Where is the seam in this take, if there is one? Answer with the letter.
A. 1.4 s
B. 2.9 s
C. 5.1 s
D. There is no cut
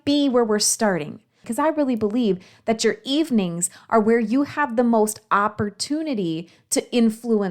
A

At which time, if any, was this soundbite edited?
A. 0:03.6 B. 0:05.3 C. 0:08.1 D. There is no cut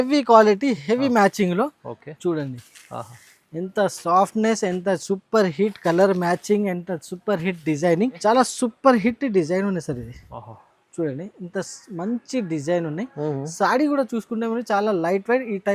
C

